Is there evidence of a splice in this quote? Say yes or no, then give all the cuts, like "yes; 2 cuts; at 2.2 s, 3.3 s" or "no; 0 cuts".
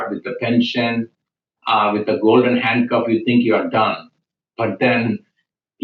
no; 0 cuts